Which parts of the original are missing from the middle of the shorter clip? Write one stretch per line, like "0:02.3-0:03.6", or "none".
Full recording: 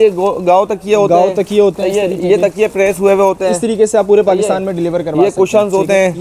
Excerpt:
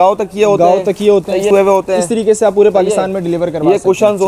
0:02.0-0:03.0